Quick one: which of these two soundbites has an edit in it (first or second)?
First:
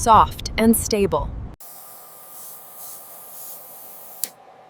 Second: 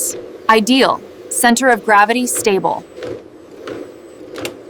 first